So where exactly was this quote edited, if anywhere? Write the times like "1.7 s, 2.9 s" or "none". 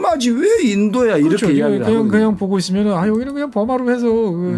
none